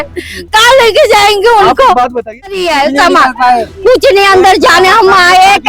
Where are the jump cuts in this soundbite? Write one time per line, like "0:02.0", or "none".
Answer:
0:02.6